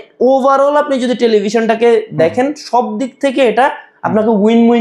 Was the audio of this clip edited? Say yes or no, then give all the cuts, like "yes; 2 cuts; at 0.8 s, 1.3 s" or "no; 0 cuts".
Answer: no; 0 cuts